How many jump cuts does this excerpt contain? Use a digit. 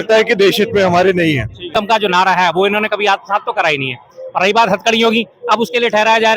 1